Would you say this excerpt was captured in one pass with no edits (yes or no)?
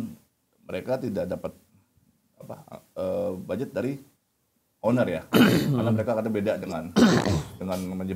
yes